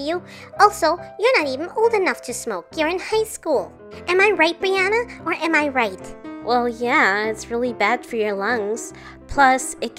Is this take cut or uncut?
uncut